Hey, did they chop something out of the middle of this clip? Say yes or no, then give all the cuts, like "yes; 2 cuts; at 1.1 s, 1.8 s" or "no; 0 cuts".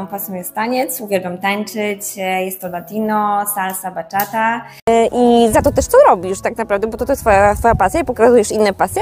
yes; 1 cut; at 4.9 s